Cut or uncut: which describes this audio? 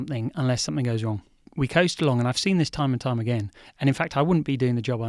cut